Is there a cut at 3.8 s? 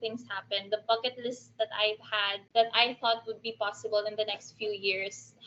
no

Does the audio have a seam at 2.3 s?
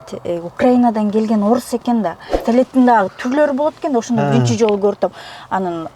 yes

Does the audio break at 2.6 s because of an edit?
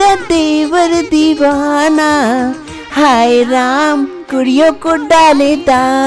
no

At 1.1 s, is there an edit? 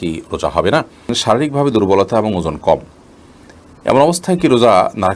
yes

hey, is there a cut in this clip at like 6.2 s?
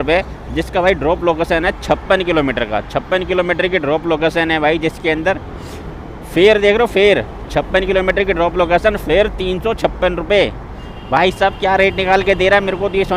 no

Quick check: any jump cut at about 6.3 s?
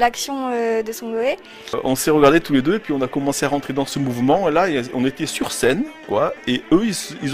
no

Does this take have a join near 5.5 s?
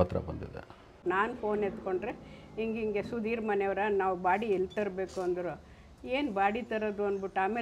no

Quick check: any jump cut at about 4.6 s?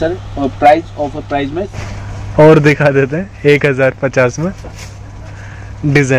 no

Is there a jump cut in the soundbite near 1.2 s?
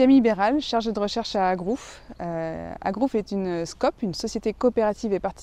no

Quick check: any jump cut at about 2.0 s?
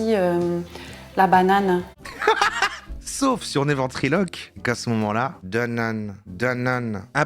yes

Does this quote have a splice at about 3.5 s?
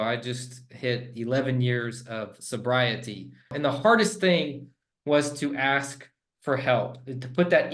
yes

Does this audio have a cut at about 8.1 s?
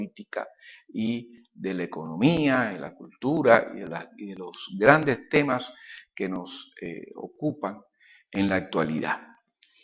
no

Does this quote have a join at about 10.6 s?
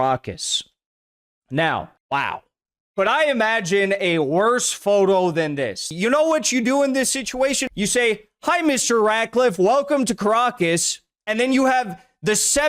no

